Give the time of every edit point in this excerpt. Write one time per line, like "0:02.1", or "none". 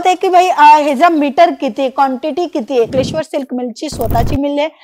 0:02.9